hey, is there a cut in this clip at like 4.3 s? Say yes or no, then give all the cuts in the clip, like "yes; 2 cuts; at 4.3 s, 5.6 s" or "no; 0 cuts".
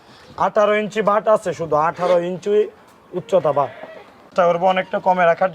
yes; 1 cut; at 4.3 s